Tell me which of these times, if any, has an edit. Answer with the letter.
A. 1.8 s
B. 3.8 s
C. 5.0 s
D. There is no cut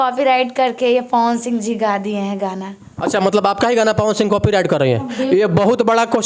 D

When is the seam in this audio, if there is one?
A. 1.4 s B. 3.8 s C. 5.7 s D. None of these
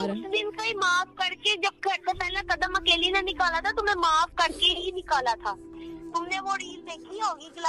C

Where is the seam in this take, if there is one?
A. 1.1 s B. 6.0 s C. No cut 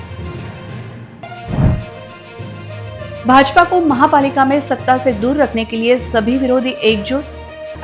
A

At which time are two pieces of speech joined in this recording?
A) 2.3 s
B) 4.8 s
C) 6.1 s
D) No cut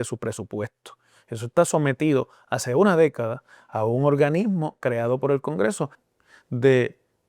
C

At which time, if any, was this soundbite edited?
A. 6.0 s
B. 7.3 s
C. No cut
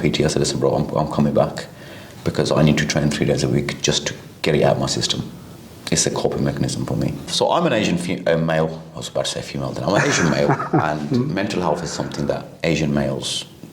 B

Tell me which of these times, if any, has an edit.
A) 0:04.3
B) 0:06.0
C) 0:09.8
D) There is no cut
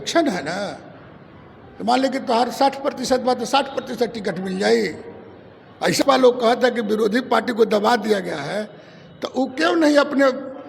B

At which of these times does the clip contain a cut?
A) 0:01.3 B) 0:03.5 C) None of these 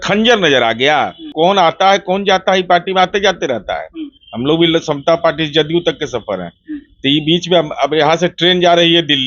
A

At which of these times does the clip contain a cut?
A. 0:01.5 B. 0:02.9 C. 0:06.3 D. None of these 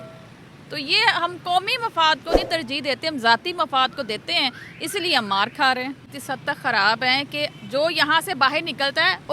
C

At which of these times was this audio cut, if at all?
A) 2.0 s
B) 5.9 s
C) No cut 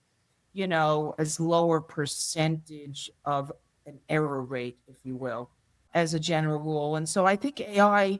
B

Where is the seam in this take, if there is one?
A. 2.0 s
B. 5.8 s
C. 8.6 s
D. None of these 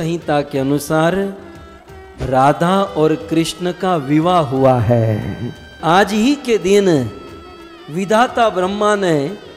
B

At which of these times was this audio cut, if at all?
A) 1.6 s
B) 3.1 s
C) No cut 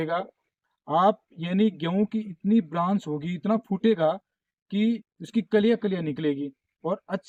C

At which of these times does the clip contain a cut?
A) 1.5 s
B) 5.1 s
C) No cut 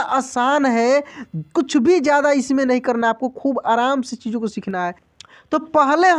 B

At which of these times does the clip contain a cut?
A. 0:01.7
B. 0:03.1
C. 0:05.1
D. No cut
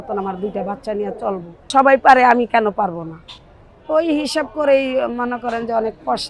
A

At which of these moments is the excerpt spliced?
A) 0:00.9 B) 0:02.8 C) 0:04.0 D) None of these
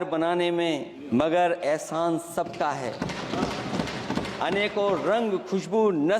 A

